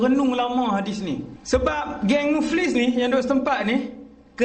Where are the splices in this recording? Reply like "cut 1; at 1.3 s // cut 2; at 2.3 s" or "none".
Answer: cut 1; at 1.3 s